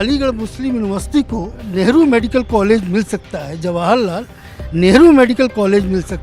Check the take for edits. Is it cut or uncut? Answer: cut